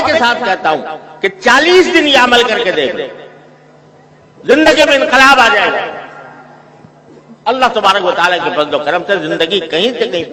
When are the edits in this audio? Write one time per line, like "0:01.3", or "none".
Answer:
none